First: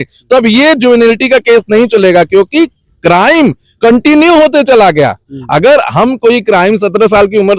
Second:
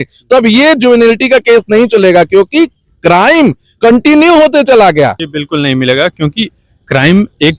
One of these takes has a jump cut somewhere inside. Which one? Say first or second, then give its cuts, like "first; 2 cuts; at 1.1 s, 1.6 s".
second; 1 cut; at 5.3 s